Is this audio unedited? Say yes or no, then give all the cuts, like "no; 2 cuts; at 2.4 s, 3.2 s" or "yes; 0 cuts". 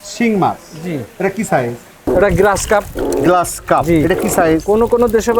no; 1 cut; at 1.9 s